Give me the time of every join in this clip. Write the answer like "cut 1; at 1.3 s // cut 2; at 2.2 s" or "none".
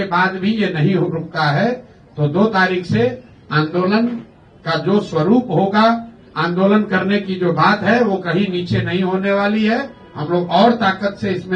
none